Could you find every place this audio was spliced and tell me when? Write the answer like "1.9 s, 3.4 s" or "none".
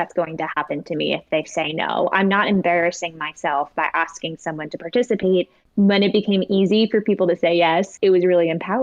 5.6 s, 7.9 s